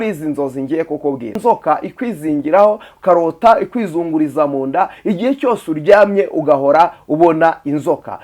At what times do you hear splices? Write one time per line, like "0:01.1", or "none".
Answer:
0:01.4

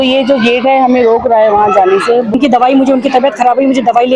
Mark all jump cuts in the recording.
0:02.3

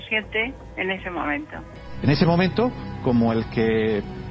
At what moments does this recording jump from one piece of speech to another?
0:01.7

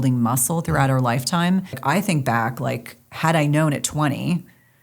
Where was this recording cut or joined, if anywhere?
0:01.8

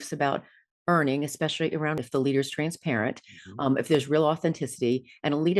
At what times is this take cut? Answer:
0:02.0

